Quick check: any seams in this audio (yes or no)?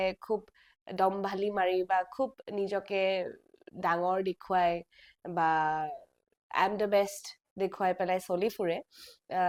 no